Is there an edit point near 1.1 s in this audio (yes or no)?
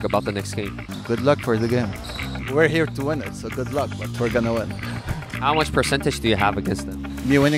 no